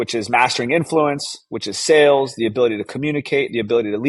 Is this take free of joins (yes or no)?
yes